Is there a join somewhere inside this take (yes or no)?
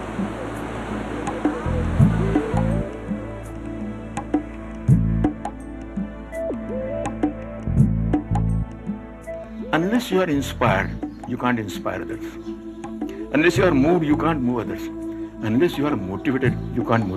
yes